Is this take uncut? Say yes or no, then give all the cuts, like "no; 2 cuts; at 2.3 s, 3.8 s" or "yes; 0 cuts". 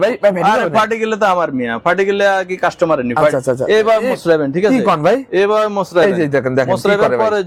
yes; 0 cuts